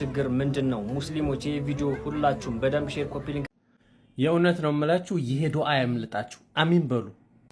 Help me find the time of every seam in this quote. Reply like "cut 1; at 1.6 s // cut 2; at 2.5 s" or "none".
cut 1; at 3.5 s

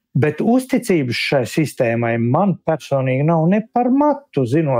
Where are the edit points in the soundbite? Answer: none

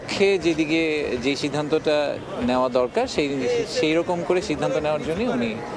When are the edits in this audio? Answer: none

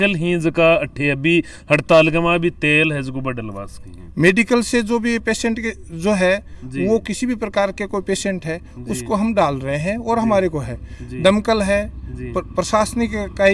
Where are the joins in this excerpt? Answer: none

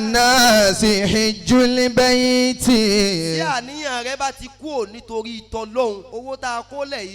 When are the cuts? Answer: cut 1; at 6.0 s

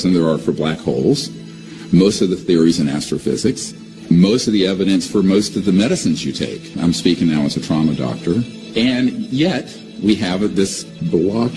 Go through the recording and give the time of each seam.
none

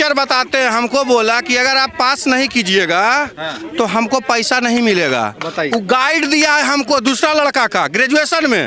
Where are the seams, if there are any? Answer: none

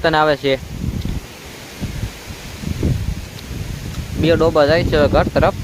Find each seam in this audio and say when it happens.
none

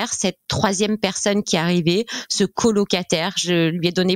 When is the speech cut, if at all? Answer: none

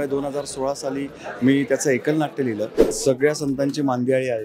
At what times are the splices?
cut 1; at 2.9 s

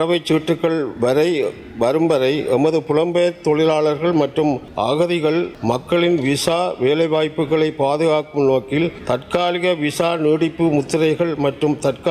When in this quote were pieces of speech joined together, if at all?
cut 1; at 4.7 s // cut 2; at 5.5 s // cut 3; at 9.0 s

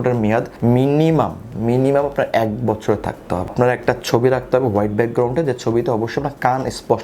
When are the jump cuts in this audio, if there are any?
cut 1; at 3.5 s

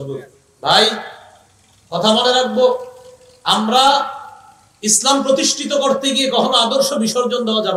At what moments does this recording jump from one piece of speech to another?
none

